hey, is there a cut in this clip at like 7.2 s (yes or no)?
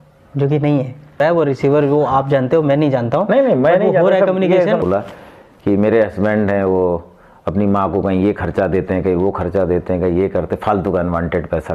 no